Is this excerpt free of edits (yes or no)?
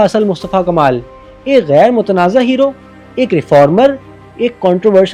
yes